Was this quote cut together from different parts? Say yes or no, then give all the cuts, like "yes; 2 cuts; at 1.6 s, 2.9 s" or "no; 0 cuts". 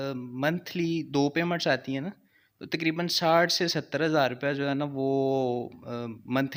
no; 0 cuts